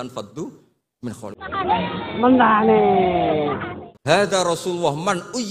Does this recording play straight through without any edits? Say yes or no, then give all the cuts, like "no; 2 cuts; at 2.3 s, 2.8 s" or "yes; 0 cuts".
no; 2 cuts; at 1.4 s, 4.2 s